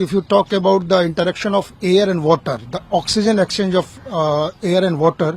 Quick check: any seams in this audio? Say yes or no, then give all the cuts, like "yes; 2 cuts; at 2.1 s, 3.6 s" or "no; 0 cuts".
no; 0 cuts